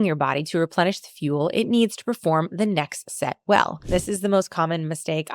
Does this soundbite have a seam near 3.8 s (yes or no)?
yes